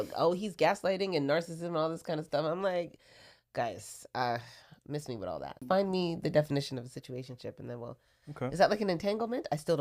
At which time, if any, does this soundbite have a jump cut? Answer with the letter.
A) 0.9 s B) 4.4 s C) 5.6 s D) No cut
C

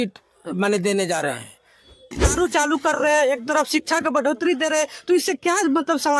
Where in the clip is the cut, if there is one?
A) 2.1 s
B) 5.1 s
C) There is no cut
A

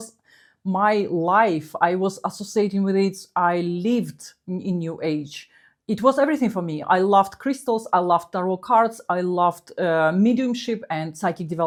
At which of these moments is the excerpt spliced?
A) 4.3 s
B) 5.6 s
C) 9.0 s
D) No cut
D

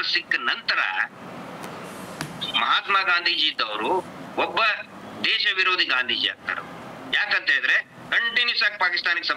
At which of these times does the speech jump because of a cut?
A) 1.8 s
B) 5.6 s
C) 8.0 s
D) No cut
D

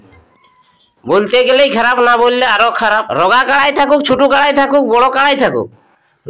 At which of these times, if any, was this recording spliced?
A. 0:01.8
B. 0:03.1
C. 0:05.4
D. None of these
B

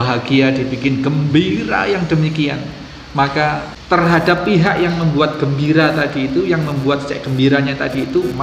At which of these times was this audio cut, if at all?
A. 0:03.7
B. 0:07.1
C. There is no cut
A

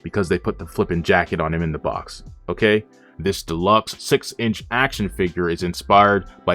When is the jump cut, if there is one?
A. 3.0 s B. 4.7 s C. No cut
A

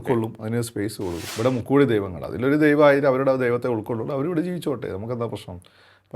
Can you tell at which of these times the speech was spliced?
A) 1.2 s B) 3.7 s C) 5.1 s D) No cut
A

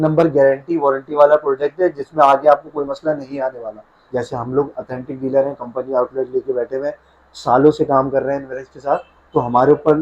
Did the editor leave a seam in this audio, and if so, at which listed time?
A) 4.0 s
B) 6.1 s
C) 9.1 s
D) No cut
A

